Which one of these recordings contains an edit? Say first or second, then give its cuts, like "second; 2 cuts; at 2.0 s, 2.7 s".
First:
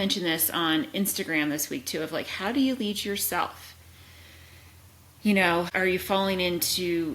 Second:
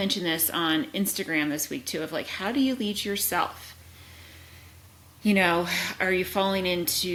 first; 1 cut; at 5.7 s